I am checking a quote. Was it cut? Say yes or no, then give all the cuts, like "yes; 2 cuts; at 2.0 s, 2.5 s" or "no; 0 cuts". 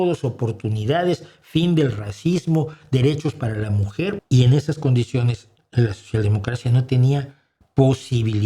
yes; 1 cut; at 4.2 s